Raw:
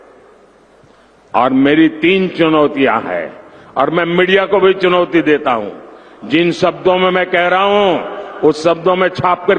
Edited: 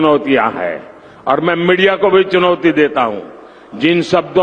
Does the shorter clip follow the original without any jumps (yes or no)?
yes